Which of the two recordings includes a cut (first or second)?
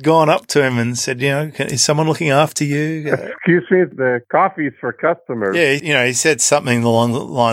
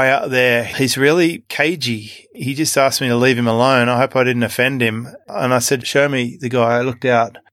second